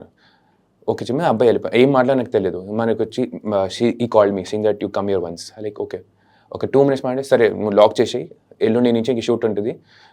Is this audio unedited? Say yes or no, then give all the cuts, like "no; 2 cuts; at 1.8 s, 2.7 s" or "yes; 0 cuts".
yes; 0 cuts